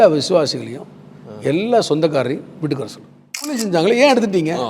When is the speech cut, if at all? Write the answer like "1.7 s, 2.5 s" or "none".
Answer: 3.6 s